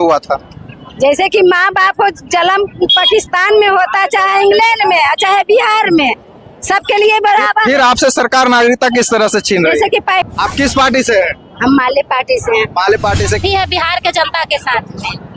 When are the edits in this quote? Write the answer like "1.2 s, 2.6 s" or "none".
10.2 s, 13.4 s